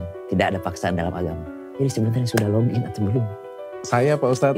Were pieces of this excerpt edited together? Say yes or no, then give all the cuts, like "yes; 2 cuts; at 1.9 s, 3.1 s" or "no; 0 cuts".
no; 0 cuts